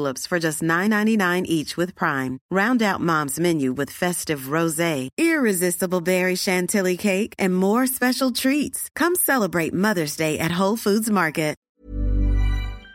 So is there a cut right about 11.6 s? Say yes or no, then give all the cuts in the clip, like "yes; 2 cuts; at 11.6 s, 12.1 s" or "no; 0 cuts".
yes; 1 cut; at 11.6 s